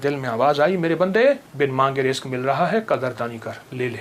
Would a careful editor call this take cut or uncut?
cut